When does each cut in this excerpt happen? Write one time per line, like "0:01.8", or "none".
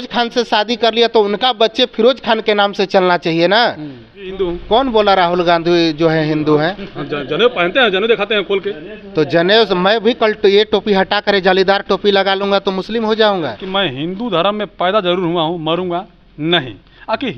0:04.3
0:13.6